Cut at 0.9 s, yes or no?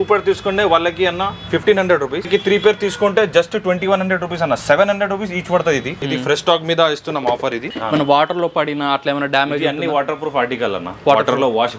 no